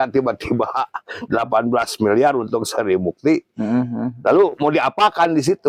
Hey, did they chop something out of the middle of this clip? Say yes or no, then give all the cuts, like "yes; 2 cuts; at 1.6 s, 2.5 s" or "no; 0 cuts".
no; 0 cuts